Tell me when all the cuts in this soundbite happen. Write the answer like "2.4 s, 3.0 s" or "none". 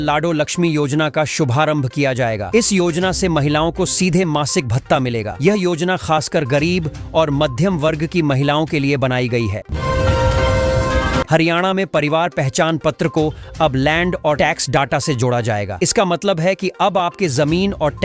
9.7 s, 11.3 s